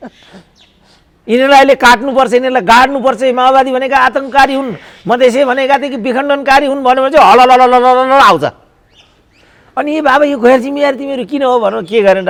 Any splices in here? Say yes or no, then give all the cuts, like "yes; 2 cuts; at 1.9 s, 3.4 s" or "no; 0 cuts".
no; 0 cuts